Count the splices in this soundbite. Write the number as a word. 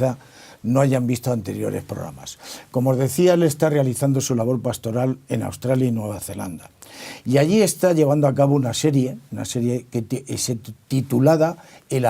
one